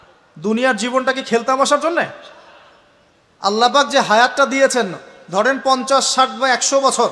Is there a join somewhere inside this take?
no; 0 cuts

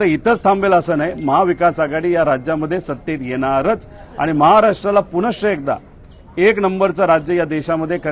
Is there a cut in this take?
no; 0 cuts

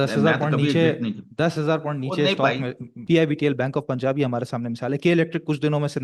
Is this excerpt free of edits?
no; 1 cut; at 2.9 s

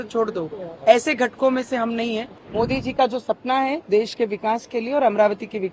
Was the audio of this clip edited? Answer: yes; 1 cut; at 2.4 s

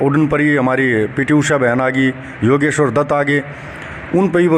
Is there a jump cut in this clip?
no; 0 cuts

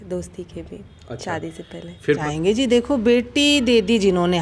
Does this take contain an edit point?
yes; 1 cut; at 2.2 s

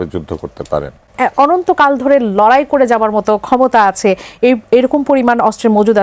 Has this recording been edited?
yes; 1 cut; at 1.0 s

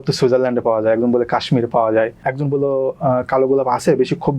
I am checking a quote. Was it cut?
yes; 1 cut; at 2.3 s

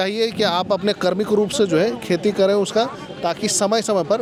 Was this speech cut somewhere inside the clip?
no; 0 cuts

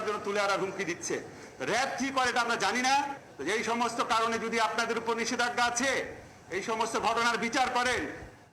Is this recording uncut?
no; 1 cut; at 3.2 s

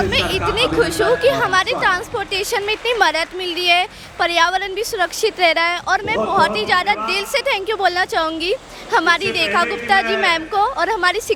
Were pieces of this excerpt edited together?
no; 0 cuts

